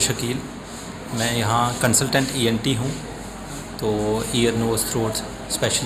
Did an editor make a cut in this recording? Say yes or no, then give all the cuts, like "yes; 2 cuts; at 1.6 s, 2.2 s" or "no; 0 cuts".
no; 0 cuts